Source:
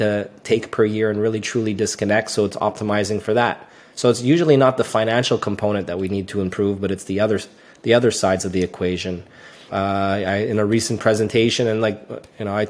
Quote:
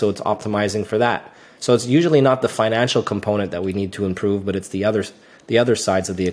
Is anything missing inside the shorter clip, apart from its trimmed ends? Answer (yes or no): no